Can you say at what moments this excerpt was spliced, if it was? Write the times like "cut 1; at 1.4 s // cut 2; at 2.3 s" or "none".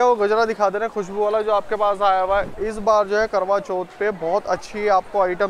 none